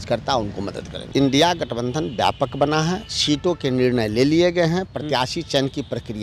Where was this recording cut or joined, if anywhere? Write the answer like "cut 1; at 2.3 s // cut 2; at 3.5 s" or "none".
cut 1; at 0.9 s